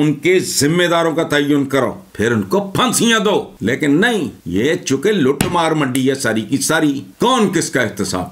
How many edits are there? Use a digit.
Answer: 4